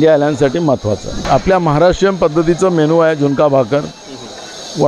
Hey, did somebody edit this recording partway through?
yes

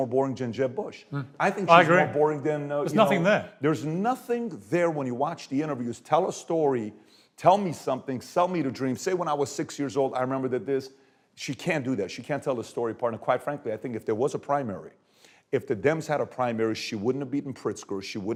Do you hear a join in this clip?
no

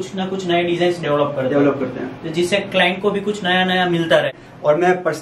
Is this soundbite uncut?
no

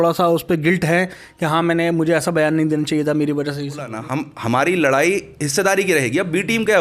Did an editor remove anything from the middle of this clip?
yes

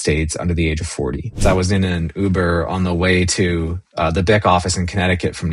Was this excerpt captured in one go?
no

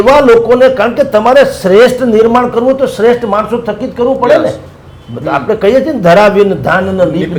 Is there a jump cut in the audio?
no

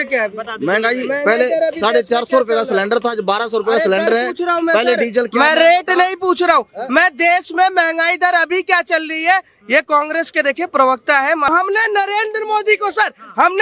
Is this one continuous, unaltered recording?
no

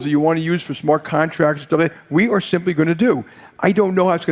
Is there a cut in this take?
no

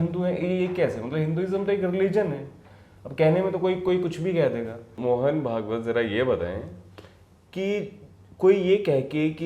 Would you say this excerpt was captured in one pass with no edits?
no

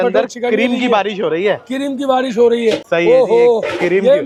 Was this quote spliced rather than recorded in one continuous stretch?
no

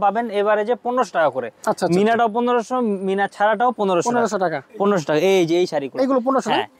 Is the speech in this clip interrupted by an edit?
no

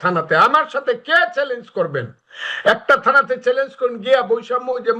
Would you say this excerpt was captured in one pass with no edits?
yes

